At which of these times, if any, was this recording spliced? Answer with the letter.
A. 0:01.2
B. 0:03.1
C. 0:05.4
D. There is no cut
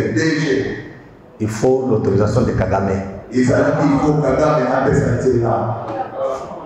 D